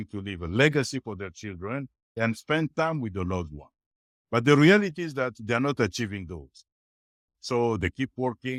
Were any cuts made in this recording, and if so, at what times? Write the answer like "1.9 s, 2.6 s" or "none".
none